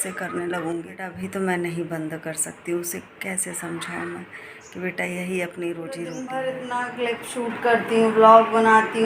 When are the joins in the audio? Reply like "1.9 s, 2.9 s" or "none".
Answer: 1.2 s, 6.2 s